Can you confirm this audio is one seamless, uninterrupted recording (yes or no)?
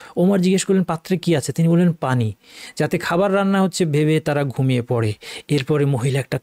yes